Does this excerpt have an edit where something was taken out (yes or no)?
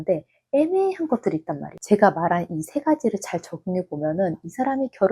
yes